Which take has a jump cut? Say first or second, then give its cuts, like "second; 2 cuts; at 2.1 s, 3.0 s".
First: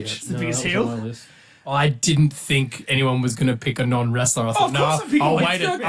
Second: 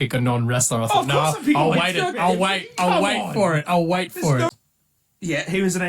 second; 1 cut; at 4.5 s